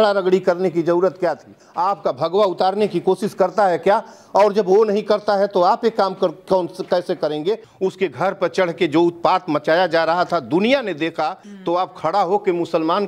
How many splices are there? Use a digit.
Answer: 3